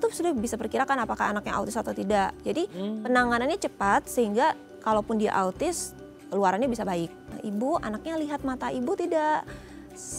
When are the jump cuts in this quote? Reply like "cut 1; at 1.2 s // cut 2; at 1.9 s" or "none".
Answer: cut 1; at 7.3 s